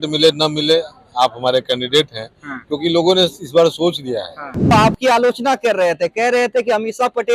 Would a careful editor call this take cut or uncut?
cut